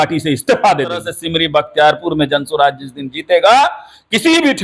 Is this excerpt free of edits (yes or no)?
no